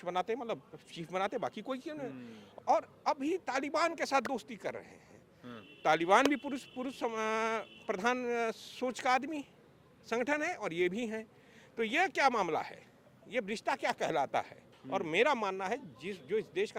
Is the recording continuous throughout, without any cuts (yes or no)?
no